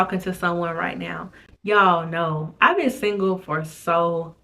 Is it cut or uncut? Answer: uncut